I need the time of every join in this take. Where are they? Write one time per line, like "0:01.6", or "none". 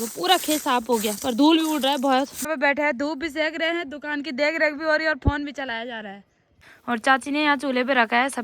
0:02.5
0:06.6